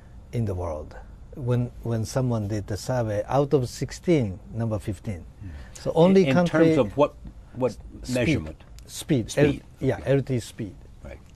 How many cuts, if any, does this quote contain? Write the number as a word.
one